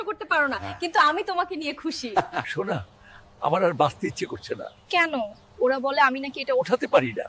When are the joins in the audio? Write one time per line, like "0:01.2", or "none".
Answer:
none